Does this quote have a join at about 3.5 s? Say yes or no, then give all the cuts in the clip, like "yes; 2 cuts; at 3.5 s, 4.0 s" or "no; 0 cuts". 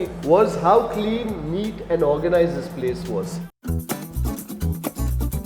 yes; 1 cut; at 3.5 s